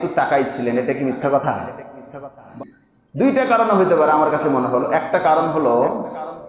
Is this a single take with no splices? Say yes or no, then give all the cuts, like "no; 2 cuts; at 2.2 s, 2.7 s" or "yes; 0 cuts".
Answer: no; 1 cut; at 2.5 s